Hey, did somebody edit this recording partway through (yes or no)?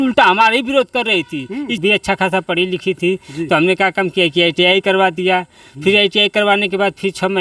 yes